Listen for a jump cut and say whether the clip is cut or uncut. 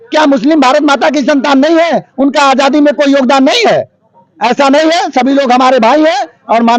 uncut